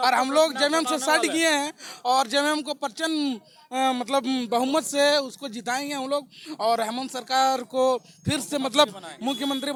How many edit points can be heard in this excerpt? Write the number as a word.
zero